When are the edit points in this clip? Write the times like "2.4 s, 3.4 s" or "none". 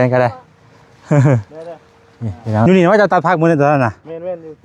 2.7 s